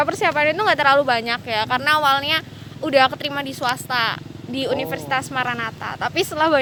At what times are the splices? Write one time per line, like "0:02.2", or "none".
none